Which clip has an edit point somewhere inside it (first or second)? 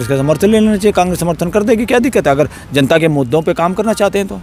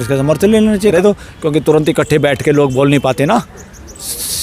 second